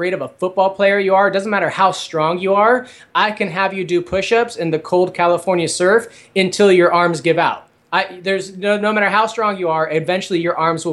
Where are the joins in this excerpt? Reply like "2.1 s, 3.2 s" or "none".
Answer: none